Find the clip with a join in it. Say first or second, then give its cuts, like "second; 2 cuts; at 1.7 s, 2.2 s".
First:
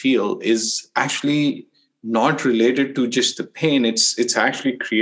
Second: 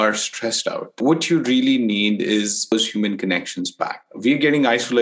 second; 2 cuts; at 0.9 s, 2.7 s